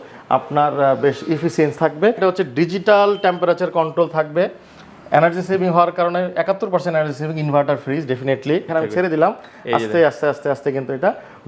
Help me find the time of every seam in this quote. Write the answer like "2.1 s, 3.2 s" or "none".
2.2 s, 8.7 s